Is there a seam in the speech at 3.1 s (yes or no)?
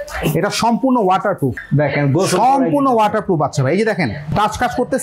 no